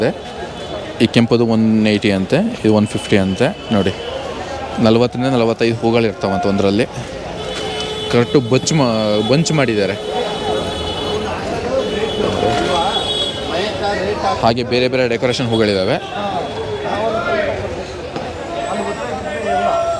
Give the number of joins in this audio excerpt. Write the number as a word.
zero